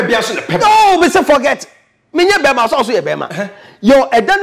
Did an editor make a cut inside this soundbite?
no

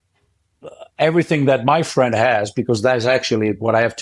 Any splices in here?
no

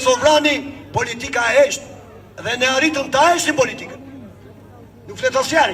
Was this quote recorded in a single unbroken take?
yes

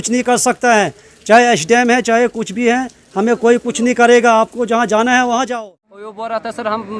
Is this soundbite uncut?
no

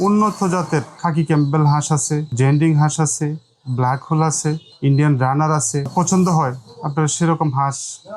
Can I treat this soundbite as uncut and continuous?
no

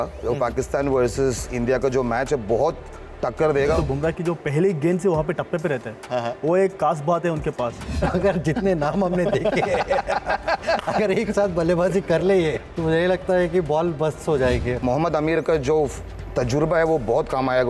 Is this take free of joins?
no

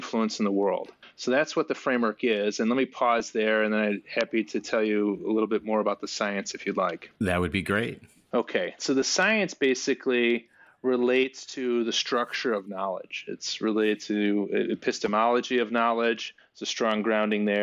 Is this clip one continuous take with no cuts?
yes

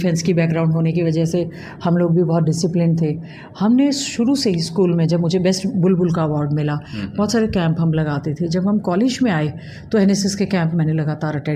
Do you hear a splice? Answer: no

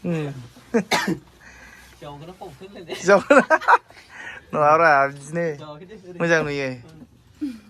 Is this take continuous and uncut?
yes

